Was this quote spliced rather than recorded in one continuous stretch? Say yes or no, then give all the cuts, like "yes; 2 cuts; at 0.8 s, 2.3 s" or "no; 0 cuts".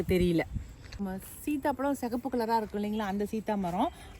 yes; 1 cut; at 1.0 s